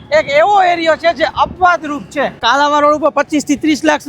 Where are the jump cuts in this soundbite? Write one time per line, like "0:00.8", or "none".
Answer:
0:02.4